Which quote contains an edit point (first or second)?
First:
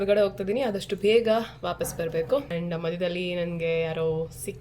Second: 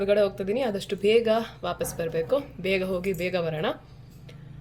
first